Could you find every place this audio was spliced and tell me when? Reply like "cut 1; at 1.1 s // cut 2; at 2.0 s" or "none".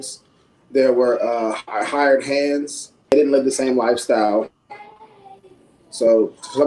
cut 1; at 3.1 s